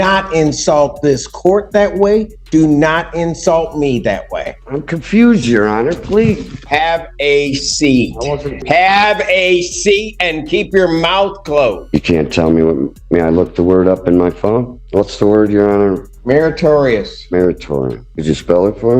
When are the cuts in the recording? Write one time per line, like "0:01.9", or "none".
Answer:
0:04.6
0:06.6
0:08.6
0:11.8
0:14.8
0:16.1
0:18.1